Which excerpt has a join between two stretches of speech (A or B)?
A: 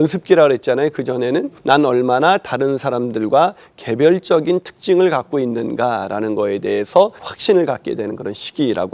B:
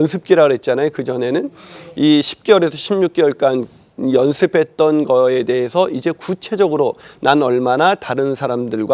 A